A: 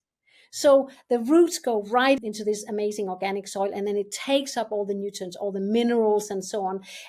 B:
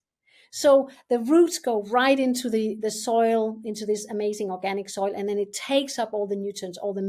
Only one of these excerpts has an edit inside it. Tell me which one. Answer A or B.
A